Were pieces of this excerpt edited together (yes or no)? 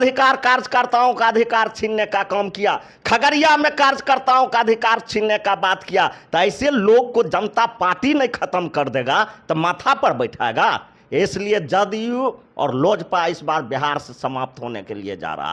no